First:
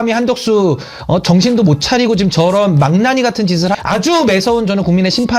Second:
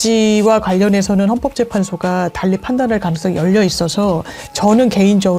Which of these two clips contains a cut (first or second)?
first